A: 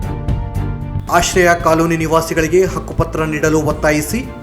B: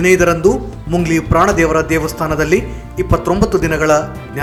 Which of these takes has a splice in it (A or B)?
A